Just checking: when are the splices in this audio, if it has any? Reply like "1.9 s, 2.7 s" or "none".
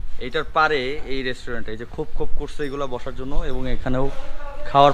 none